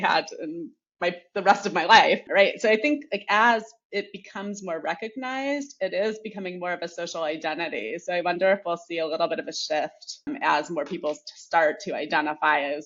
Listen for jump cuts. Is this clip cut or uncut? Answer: uncut